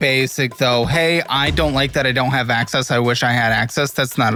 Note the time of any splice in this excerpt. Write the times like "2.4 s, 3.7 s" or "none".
none